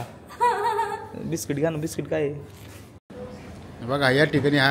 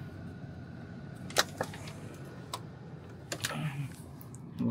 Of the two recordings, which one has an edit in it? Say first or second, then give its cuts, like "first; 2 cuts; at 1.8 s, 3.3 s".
first; 1 cut; at 3.1 s